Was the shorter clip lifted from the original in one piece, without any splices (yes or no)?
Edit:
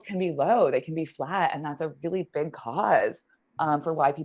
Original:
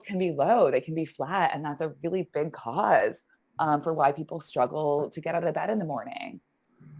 yes